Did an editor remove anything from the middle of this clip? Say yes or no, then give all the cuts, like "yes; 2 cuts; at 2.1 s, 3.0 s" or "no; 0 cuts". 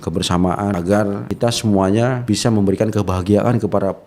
yes; 2 cuts; at 0.8 s, 2.2 s